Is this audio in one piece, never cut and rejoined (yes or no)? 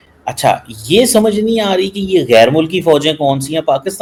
yes